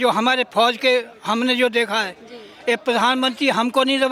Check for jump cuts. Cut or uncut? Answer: uncut